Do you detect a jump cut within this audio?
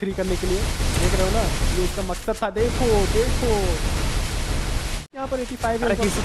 yes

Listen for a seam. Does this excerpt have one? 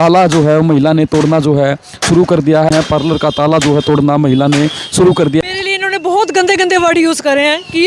yes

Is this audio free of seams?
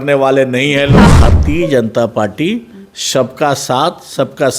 no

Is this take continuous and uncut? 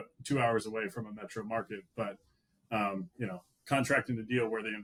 yes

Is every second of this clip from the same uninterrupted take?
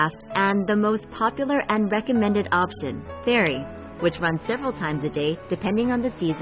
yes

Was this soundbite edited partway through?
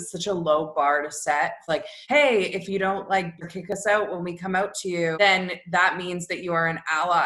yes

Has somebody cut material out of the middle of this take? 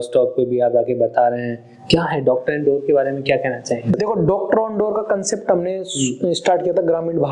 no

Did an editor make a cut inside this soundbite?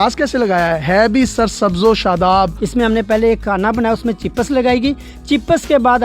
yes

